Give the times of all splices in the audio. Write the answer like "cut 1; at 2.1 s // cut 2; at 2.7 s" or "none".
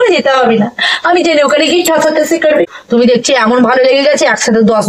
cut 1; at 2.7 s